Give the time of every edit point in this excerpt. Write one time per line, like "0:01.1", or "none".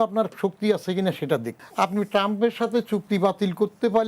0:01.6

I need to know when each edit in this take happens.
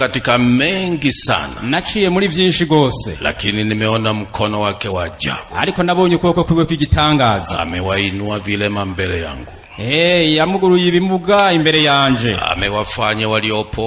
none

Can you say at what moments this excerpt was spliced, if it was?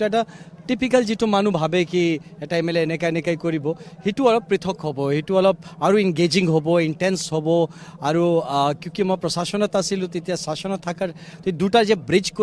none

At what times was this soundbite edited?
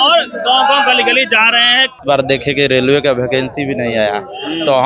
0:02.0

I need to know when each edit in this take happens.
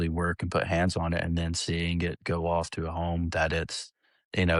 none

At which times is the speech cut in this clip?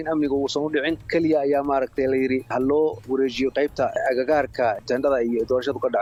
none

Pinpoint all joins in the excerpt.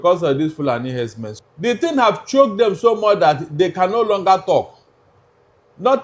0:01.2

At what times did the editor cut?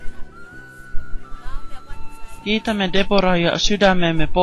0:01.9

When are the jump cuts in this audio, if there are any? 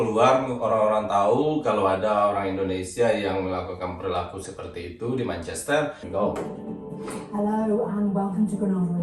0:06.0

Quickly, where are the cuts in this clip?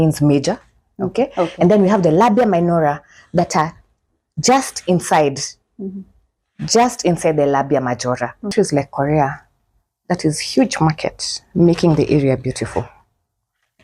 0:08.5

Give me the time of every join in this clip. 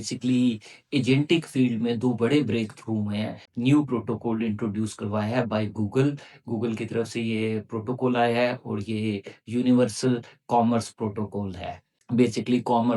0:03.4
0:11.9

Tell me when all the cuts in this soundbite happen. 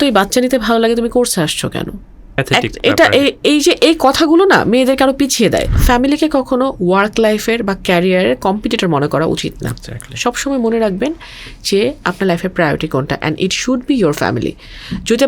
0:02.4
0:05.7

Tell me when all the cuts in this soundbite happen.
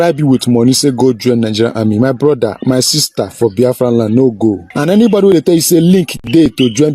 0:04.7

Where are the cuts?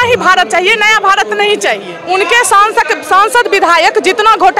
0:01.9

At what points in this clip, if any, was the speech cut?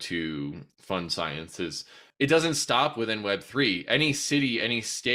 0:02.0

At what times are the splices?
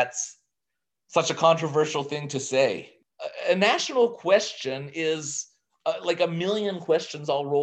0:02.9

